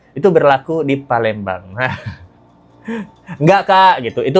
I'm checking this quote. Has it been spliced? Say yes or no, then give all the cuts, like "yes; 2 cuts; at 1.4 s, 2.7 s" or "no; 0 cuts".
no; 0 cuts